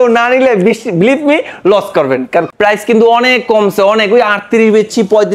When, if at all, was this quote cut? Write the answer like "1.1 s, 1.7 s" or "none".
2.5 s